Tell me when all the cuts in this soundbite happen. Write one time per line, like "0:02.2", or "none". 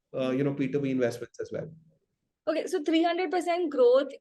none